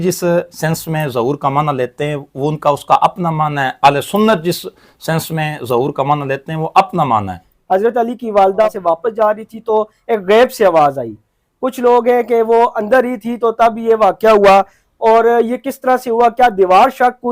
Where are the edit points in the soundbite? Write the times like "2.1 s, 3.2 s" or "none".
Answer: 7.4 s, 8.7 s